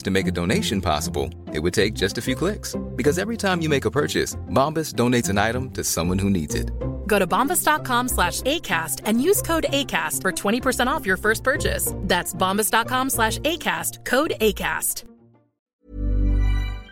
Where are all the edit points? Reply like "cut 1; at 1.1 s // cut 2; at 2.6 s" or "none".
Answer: cut 1; at 15.8 s